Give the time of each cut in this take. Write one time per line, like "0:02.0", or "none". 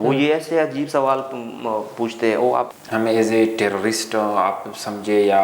0:02.7